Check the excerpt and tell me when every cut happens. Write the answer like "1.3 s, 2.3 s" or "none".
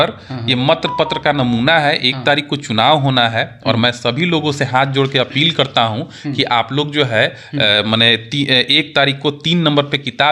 none